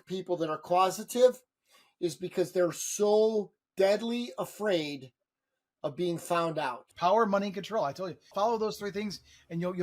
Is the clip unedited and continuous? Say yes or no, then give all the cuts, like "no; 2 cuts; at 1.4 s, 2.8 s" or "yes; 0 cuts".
no; 2 cuts; at 6.8 s, 8.2 s